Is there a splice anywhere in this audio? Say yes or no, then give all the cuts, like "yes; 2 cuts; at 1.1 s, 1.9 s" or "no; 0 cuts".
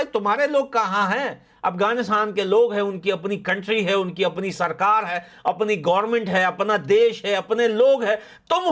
no; 0 cuts